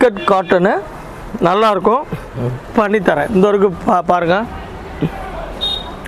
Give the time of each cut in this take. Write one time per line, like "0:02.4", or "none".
0:02.7